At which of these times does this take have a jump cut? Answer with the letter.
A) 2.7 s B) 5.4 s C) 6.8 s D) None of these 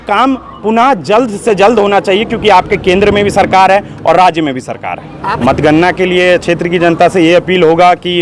B